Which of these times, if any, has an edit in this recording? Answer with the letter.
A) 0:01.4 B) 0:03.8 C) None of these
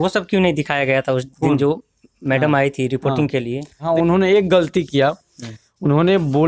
B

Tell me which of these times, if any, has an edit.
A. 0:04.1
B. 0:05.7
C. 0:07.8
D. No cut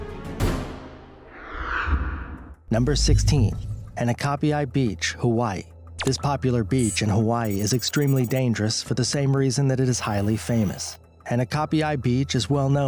A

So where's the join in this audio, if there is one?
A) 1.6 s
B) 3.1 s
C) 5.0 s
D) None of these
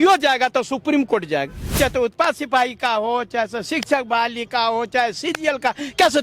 A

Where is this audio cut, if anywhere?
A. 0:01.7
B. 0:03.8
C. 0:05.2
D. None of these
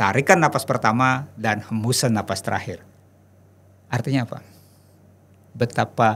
D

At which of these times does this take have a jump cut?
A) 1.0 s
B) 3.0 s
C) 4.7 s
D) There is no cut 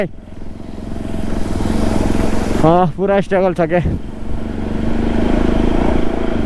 D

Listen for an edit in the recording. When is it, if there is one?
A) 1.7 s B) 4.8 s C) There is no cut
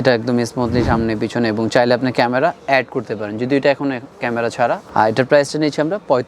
B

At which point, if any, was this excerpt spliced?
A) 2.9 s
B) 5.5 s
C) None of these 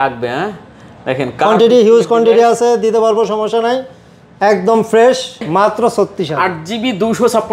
B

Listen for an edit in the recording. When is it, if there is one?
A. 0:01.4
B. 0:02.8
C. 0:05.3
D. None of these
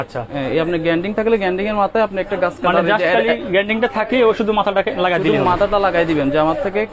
D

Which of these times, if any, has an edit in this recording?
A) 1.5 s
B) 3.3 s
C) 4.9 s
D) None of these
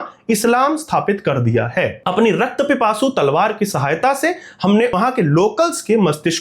C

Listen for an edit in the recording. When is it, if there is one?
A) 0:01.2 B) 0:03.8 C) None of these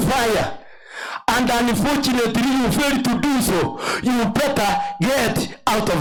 C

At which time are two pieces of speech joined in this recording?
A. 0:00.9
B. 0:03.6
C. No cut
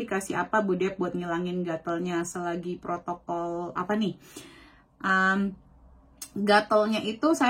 C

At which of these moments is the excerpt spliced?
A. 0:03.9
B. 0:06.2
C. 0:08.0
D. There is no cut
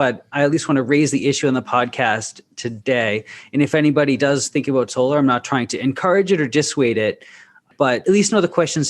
C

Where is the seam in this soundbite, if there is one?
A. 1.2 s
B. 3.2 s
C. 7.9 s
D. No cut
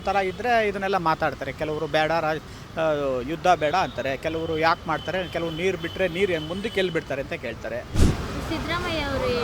C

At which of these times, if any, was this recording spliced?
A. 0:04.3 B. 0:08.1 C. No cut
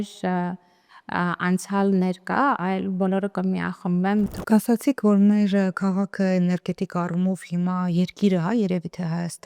A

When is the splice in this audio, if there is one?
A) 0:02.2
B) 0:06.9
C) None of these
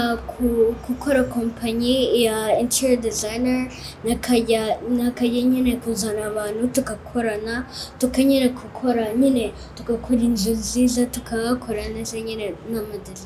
C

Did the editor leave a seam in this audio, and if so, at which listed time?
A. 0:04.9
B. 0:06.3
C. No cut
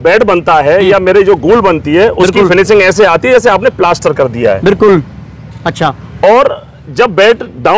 C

